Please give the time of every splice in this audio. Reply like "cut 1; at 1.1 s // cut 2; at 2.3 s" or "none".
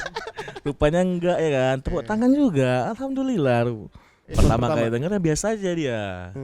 cut 1; at 4.2 s